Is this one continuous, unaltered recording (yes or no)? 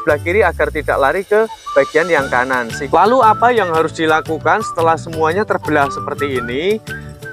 no